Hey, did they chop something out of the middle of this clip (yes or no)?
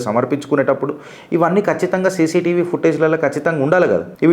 no